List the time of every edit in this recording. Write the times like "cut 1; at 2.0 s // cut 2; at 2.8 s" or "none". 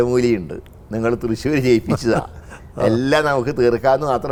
none